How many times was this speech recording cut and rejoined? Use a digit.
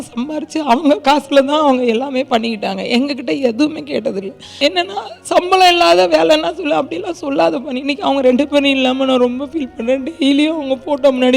1